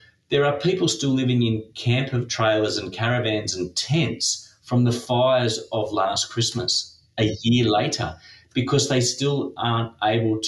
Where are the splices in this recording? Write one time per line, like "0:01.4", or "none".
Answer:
none